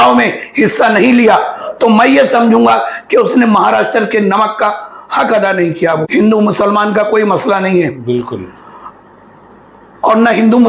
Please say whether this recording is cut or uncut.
cut